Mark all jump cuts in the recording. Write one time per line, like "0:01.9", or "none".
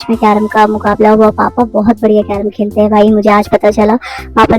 none